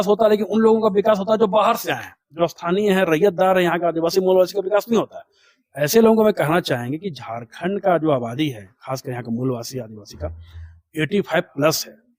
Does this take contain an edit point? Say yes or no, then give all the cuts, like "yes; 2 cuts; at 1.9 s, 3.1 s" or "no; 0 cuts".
no; 0 cuts